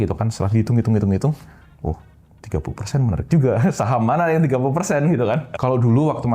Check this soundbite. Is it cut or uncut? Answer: uncut